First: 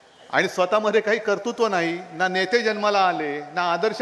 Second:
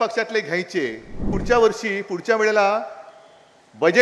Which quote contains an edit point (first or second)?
second